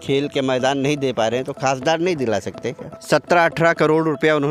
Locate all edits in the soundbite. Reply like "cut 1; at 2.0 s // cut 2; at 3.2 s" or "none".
cut 1; at 2.9 s